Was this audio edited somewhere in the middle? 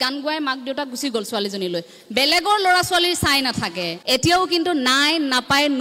yes; 1 cut; at 3.9 s

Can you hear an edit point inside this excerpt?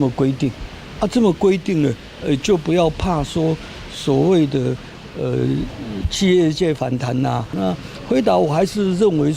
yes; 1 cut; at 7.6 s

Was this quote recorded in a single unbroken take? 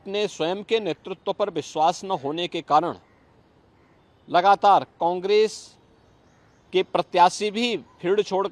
yes; 0 cuts

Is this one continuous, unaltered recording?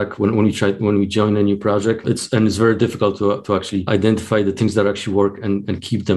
yes; 0 cuts

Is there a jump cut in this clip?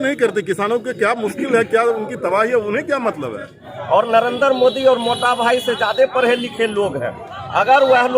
yes; 1 cut; at 3.7 s

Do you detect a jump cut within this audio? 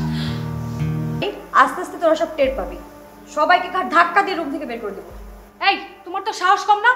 yes; 1 cut; at 1.1 s

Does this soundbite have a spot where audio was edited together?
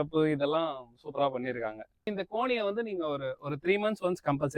yes; 1 cut; at 2.1 s

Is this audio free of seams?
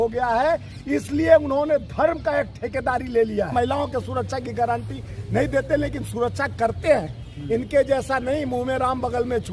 no; 1 cut; at 3.5 s

